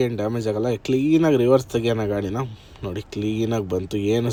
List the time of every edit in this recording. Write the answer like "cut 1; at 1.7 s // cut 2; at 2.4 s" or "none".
none